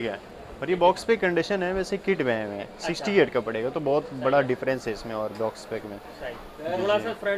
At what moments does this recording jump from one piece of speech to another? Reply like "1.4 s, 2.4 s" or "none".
none